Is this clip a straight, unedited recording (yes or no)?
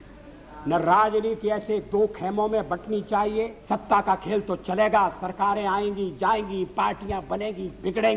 no